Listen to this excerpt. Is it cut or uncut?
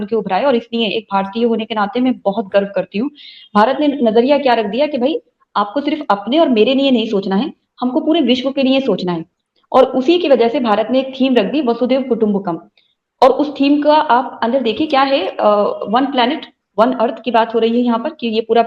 uncut